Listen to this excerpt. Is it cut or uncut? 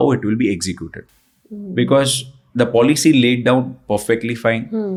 uncut